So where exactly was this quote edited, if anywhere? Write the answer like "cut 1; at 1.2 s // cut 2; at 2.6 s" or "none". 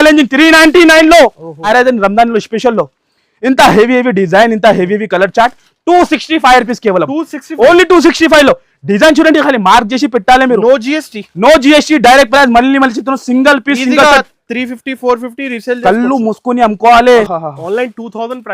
cut 1; at 1.7 s // cut 2; at 17.3 s